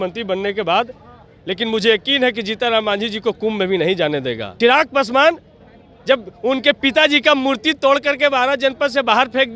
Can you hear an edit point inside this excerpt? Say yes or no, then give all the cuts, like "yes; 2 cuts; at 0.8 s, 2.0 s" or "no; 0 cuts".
yes; 1 cut; at 4.5 s